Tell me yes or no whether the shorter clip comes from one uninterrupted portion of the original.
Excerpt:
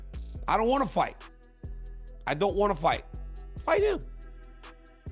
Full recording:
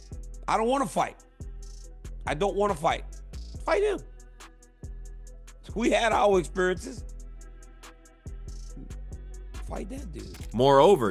no